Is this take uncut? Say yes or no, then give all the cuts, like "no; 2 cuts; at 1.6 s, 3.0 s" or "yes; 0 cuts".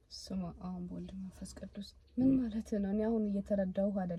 yes; 0 cuts